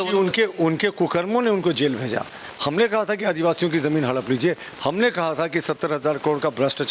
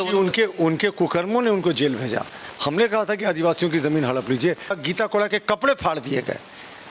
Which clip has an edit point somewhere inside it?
second; 1 cut; at 4.8 s

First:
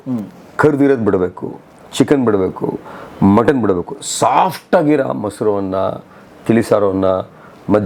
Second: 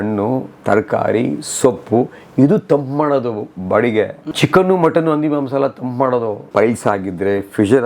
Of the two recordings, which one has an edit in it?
second; 2 cuts; at 4.2 s, 6.5 s

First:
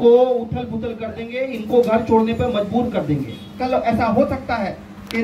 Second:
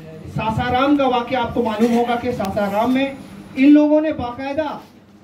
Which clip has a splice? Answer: first; 1 cut; at 3.6 s

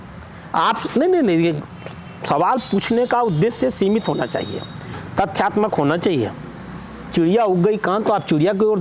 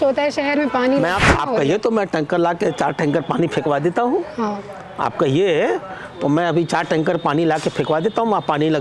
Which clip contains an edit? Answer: second; 1 cut; at 1.4 s

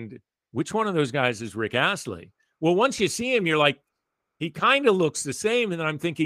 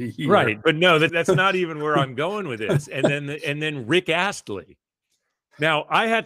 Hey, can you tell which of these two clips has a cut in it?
second; 1 cut; at 1.1 s

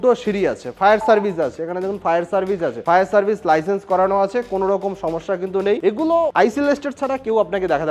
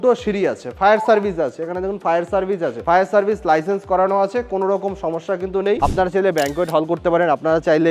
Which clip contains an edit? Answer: second; 1 cut; at 5.8 s

